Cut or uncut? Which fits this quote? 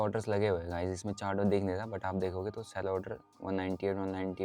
uncut